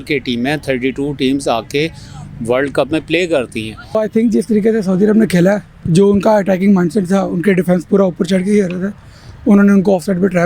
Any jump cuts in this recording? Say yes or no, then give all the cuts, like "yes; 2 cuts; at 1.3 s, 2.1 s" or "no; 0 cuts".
yes; 1 cut; at 3.9 s